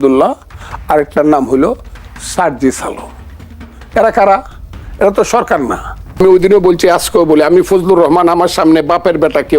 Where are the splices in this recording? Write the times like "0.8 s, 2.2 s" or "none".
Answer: 6.2 s

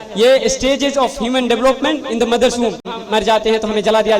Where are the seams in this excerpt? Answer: 2.9 s

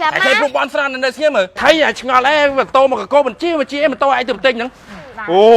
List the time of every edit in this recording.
1.6 s

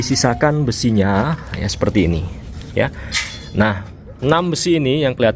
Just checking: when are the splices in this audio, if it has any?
none

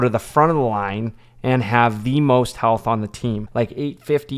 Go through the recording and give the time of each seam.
3.4 s

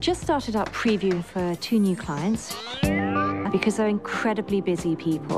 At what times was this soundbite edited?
none

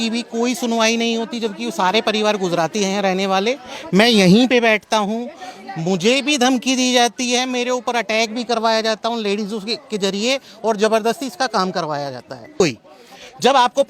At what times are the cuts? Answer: 12.6 s

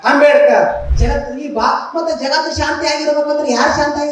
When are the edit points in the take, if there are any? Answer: 0.9 s

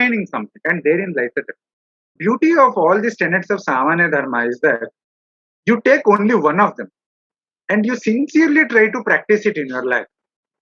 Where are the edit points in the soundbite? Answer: 2.2 s

